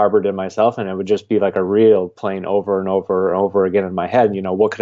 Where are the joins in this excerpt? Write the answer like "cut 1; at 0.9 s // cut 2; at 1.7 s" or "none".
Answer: none